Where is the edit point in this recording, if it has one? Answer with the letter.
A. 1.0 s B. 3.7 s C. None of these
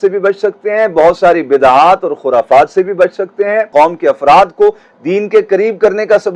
B